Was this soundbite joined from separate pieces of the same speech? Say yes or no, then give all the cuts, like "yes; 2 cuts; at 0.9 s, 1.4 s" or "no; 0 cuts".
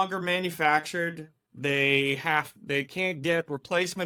no; 0 cuts